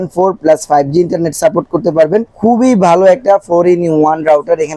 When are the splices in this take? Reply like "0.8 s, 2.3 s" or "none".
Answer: none